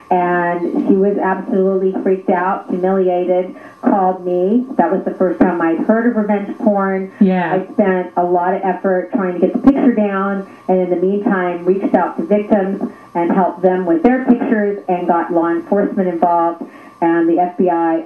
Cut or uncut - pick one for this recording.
uncut